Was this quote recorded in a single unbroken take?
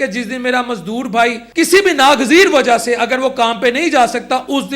no; 1 cut; at 1.4 s

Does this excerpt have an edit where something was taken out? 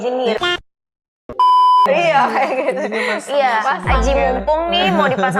no; 0 cuts

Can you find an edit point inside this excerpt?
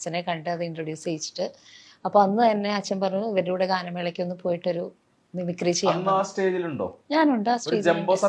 no; 0 cuts

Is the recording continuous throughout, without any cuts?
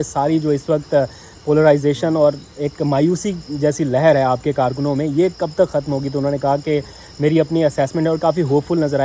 yes; 0 cuts

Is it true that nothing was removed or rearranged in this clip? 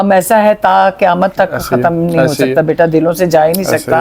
yes; 0 cuts

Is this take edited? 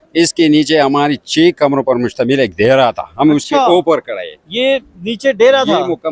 no; 0 cuts

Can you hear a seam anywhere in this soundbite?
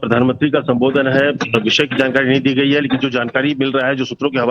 yes; 1 cut; at 3.1 s

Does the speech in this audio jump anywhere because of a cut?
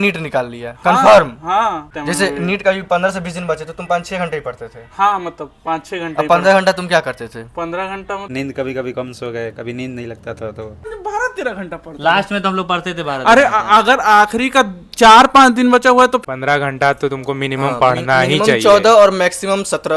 yes; 4 cuts; at 1.8 s, 8.2 s, 10.9 s, 16.2 s

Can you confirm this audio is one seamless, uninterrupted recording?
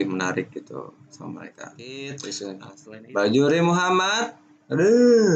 no; 1 cut; at 1.8 s

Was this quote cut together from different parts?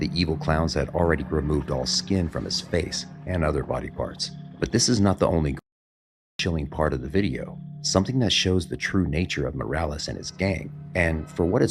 no; 0 cuts

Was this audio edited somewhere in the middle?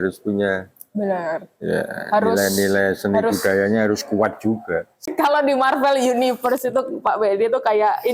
yes; 1 cut; at 5.0 s

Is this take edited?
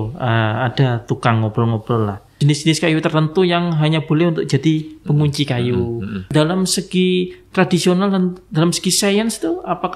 yes; 2 cuts; at 2.3 s, 6.2 s

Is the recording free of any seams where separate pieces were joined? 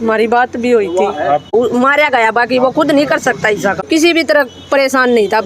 no; 2 cuts; at 1.5 s, 3.8 s

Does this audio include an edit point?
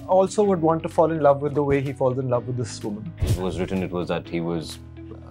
yes; 1 cut; at 3.3 s

